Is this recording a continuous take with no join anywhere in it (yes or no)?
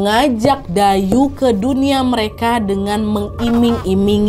yes